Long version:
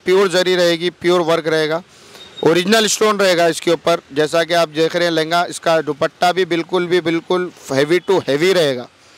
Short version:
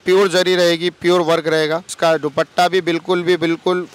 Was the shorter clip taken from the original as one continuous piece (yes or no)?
no